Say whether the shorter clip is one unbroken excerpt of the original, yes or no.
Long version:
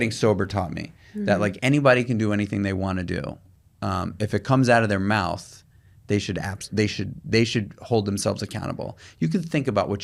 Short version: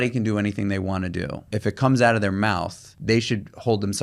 no